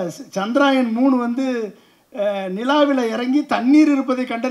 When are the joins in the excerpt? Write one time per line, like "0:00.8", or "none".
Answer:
none